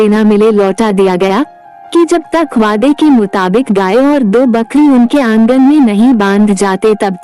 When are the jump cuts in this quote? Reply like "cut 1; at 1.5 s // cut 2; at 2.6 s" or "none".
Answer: none